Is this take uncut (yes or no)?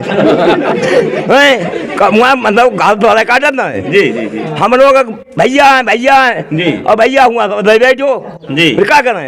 yes